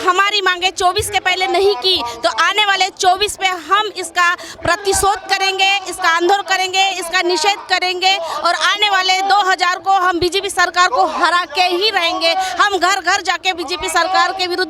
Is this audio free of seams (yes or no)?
yes